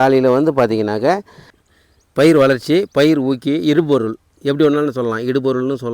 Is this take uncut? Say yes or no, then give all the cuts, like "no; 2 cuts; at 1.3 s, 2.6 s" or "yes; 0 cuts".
no; 1 cut; at 1.6 s